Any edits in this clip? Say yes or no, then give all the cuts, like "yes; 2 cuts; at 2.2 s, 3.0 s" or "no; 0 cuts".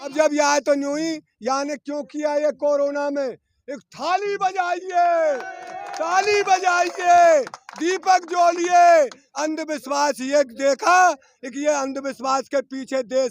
no; 0 cuts